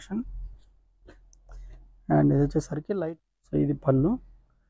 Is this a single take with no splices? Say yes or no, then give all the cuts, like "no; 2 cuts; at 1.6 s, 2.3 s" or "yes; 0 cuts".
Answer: no; 1 cut; at 2.8 s